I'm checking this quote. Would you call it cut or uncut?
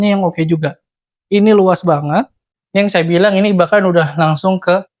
cut